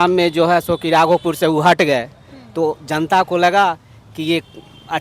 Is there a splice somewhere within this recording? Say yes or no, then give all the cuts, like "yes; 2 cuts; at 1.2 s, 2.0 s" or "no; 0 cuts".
no; 0 cuts